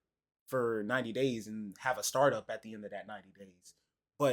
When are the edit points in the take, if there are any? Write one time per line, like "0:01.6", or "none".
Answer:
none